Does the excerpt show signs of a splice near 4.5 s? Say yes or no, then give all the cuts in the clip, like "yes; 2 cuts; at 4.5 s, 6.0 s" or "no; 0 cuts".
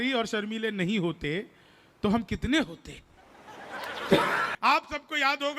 yes; 1 cut; at 4.5 s